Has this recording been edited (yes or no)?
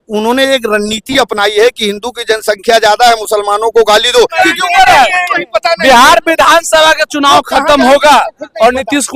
yes